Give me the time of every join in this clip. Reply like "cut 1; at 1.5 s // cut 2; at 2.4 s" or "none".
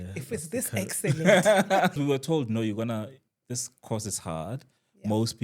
cut 1; at 2.0 s